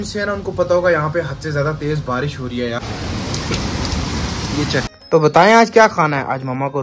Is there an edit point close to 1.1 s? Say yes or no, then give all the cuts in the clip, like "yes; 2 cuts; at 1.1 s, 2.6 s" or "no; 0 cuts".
no; 2 cuts; at 2.8 s, 4.9 s